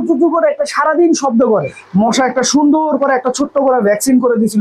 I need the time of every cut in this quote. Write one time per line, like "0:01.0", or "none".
0:01.8